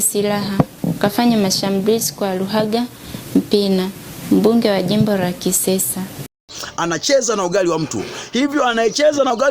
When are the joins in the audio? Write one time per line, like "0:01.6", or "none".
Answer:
0:06.3